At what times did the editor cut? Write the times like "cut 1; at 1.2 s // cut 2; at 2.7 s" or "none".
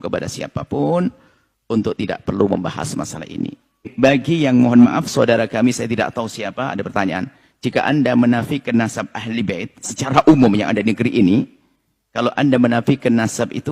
cut 1; at 3.9 s